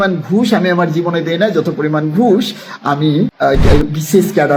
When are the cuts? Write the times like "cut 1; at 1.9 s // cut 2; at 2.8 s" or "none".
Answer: none